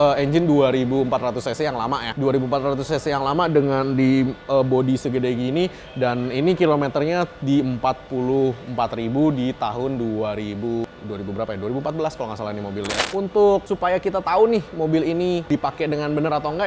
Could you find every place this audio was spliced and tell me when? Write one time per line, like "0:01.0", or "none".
0:10.8
0:13.0
0:15.5